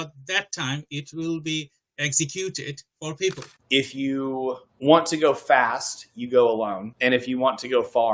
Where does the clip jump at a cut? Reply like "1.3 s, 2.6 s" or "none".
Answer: 3.6 s